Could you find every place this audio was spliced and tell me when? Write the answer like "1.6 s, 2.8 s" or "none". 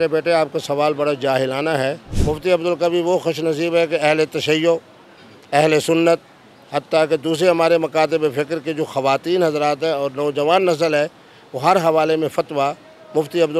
2.1 s